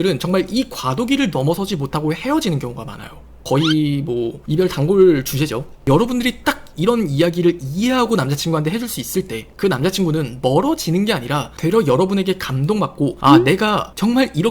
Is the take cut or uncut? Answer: cut